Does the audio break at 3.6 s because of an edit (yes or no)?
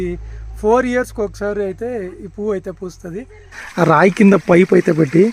yes